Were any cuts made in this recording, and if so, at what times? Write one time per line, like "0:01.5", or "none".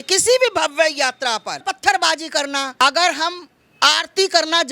0:01.6
0:02.8